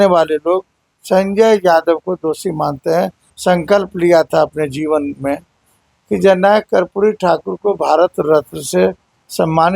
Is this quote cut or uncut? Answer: cut